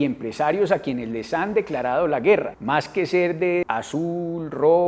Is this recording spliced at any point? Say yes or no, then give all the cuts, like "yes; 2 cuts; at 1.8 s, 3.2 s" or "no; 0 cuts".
yes; 2 cuts; at 2.6 s, 3.6 s